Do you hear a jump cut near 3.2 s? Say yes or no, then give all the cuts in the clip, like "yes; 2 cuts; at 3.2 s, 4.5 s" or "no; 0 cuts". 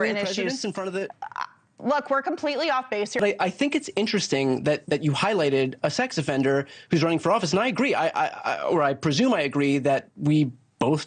yes; 1 cut; at 3.2 s